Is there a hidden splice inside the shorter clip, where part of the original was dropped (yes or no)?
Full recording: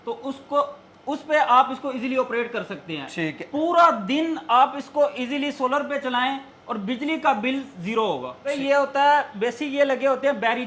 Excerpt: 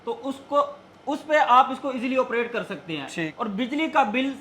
yes